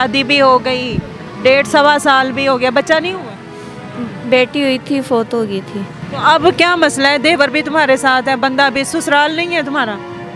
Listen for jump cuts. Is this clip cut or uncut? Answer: cut